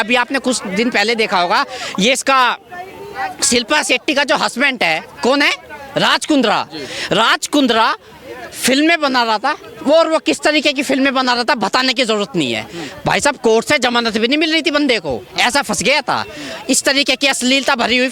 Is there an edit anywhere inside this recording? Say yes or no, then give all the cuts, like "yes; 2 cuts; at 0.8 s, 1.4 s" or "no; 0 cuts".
no; 0 cuts